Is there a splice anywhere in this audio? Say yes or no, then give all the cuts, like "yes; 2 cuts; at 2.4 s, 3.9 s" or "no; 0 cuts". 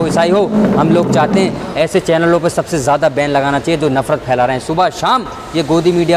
no; 0 cuts